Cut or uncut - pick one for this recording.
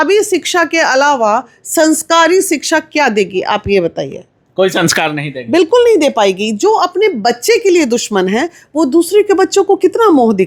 uncut